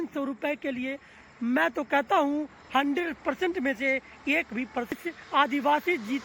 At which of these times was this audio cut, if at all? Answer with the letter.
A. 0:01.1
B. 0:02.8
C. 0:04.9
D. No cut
C